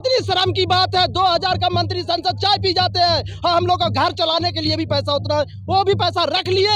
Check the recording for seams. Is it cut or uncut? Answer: uncut